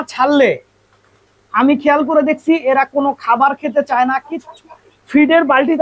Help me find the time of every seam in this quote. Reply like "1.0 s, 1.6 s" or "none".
4.4 s

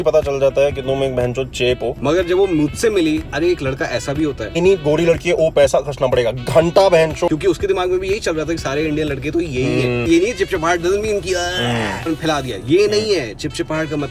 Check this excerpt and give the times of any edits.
2.0 s, 3.3 s, 4.5 s, 7.3 s, 10.1 s, 12.1 s

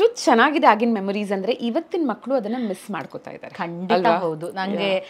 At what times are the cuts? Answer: none

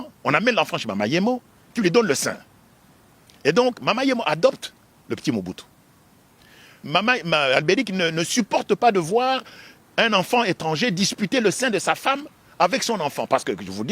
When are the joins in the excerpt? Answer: 6.8 s

